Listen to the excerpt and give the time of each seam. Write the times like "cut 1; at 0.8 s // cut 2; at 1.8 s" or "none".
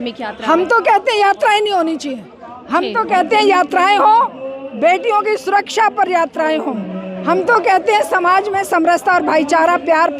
none